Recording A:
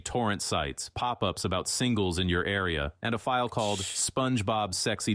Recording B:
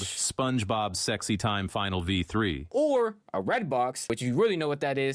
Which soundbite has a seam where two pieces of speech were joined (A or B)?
B